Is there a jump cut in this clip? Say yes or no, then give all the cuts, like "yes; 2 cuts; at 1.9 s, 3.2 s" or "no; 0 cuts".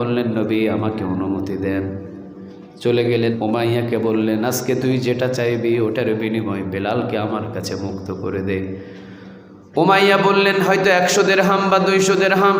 yes; 1 cut; at 3.4 s